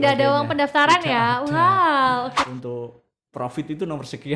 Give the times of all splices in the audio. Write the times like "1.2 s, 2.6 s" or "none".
2.4 s